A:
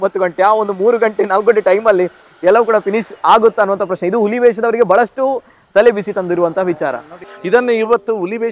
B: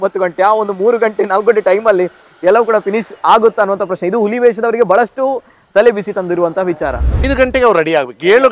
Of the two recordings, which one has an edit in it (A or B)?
B